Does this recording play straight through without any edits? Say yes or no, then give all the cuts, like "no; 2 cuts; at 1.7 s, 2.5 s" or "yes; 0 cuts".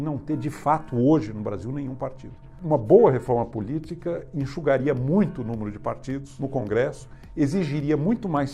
no; 2 cuts; at 2.5 s, 6.3 s